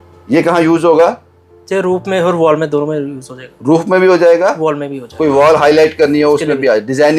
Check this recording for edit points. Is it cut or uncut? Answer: uncut